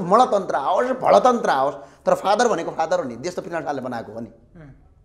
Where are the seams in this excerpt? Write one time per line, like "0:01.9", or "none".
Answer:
none